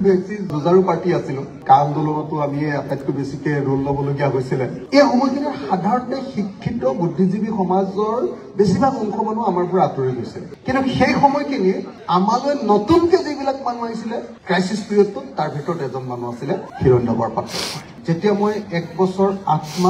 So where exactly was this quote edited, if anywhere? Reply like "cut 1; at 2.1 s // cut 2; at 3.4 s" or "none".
cut 1; at 4.8 s // cut 2; at 17.8 s